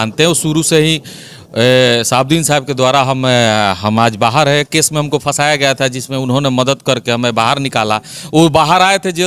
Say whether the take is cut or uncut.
uncut